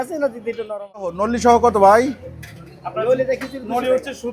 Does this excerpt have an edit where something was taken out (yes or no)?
yes